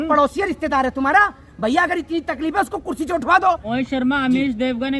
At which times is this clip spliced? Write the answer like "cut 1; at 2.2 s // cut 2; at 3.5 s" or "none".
cut 1; at 3.6 s